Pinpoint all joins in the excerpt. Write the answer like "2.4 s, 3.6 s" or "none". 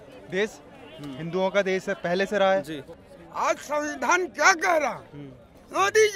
2.9 s